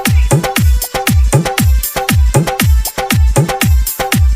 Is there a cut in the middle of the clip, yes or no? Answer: yes